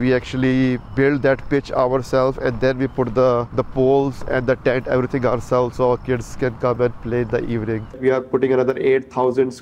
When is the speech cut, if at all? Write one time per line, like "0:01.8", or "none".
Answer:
0:08.0